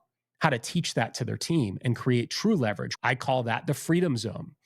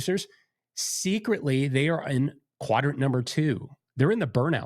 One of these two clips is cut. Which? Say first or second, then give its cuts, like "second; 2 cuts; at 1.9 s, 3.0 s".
first; 1 cut; at 2.9 s